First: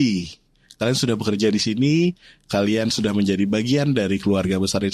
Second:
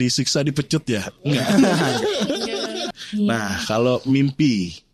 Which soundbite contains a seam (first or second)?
second